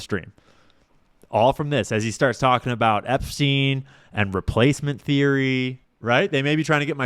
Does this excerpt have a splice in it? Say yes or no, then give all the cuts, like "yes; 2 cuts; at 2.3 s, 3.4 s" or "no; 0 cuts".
yes; 1 cut; at 5.9 s